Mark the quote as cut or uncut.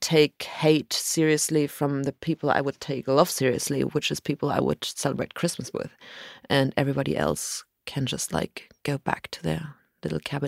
uncut